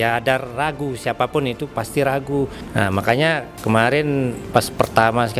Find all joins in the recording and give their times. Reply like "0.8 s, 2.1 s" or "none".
2.6 s, 3.5 s, 4.4 s